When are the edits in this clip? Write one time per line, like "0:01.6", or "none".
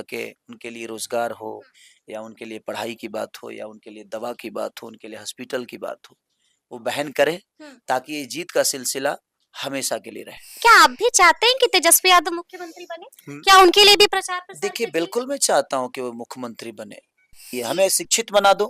0:10.6
0:17.5